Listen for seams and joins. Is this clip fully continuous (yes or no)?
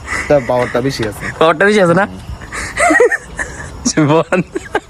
yes